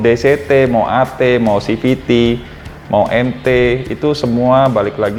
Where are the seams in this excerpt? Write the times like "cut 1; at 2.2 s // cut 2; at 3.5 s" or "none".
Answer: none

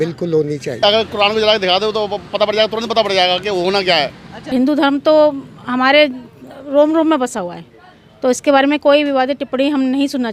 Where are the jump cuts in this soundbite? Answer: cut 1; at 0.8 s // cut 2; at 4.5 s

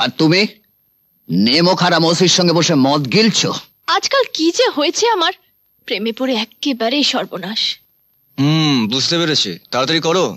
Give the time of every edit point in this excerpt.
cut 1; at 3.7 s

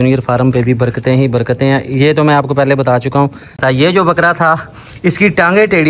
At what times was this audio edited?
cut 1; at 3.6 s

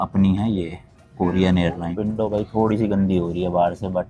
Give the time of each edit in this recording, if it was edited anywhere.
none

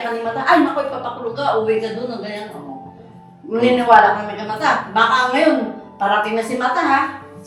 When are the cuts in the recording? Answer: none

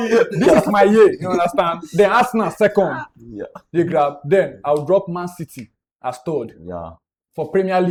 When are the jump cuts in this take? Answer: none

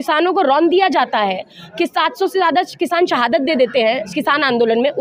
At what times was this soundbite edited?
none

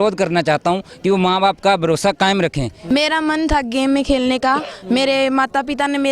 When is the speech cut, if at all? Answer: cut 1; at 2.7 s

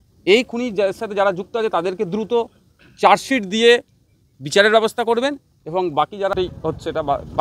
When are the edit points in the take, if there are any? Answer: cut 1; at 6.3 s

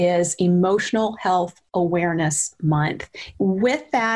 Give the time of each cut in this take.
none

